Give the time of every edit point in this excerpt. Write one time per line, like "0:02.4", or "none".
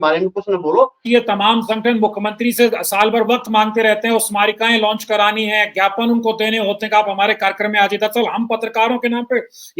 0:01.0